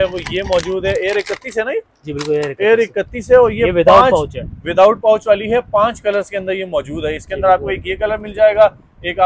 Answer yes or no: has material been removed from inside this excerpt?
no